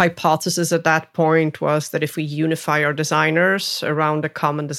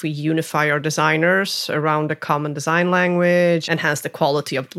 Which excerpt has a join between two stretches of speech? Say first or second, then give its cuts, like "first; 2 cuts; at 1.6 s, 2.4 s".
second; 1 cut; at 3.7 s